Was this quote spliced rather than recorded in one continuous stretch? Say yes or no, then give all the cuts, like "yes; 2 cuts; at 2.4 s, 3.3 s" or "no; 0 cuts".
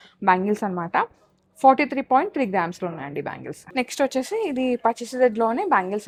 no; 0 cuts